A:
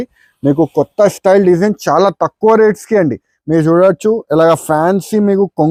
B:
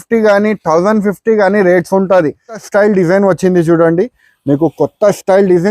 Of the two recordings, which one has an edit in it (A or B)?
B